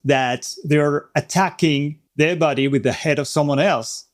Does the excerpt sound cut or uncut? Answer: cut